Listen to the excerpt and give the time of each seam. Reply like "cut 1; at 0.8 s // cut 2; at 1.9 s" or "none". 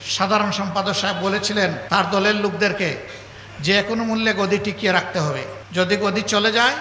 cut 1; at 1.8 s // cut 2; at 5.6 s